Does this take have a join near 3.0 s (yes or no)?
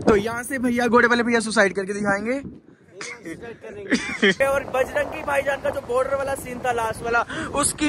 no